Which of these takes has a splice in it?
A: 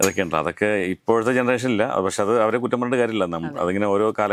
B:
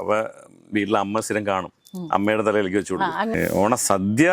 B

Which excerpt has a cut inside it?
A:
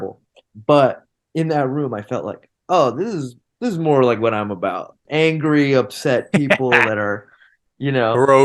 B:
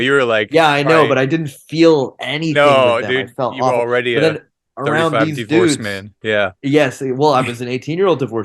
A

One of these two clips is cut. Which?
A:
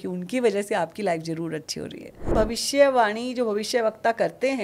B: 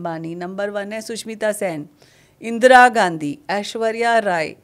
A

